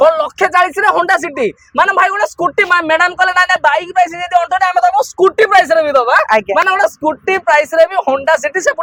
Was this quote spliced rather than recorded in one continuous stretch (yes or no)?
no